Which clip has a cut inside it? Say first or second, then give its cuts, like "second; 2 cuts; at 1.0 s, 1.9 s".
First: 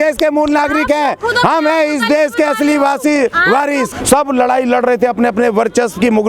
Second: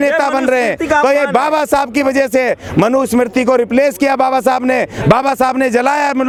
first; 1 cut; at 3.9 s